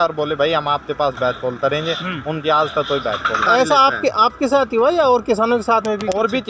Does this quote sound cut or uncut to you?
cut